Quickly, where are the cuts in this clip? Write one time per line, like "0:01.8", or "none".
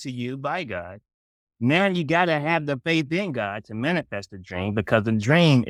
none